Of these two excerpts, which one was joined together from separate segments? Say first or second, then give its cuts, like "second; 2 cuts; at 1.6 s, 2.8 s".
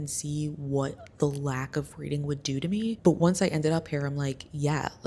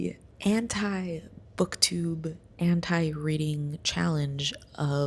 first; 1 cut; at 3.0 s